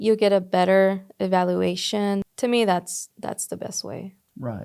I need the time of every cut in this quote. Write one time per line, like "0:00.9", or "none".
0:02.3